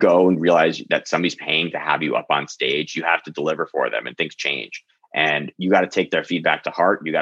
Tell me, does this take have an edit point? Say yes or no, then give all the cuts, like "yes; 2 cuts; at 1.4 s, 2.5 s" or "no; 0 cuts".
no; 0 cuts